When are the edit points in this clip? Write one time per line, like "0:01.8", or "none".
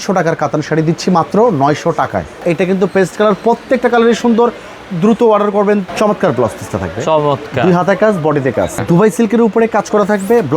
0:02.3
0:05.9
0:08.8